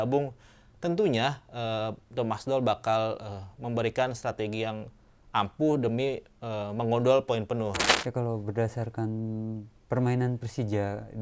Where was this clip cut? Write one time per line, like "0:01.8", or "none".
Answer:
0:07.8